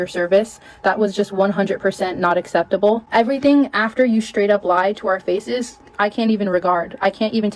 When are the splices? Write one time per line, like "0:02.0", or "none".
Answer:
none